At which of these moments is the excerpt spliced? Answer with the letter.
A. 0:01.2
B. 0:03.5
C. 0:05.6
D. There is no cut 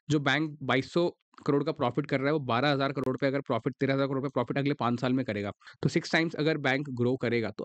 C